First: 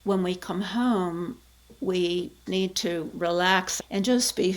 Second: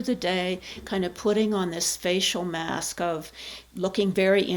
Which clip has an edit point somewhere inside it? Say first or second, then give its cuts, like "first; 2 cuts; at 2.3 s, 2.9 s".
first; 2 cuts; at 2.4 s, 3.7 s